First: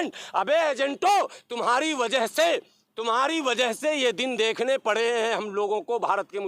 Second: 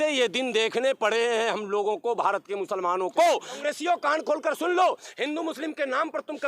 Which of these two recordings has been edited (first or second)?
second